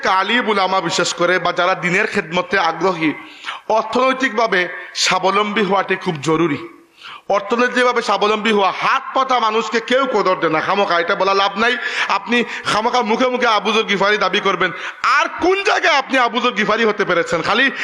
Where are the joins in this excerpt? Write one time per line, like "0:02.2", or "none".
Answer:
none